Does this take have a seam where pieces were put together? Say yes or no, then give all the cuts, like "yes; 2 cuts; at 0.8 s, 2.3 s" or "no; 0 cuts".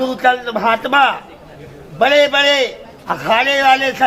no; 0 cuts